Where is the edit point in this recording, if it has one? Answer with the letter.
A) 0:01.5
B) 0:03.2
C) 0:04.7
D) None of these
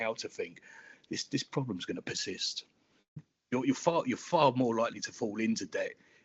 B